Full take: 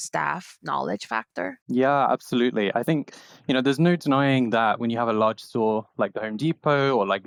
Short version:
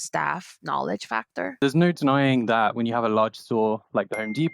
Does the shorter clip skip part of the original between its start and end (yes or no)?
yes